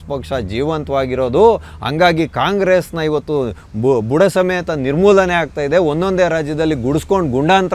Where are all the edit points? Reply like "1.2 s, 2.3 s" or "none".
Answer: none